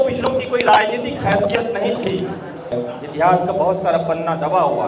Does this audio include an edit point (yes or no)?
yes